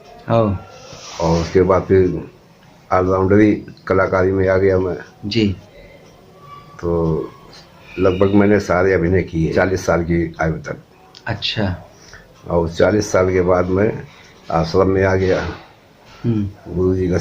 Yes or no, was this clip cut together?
yes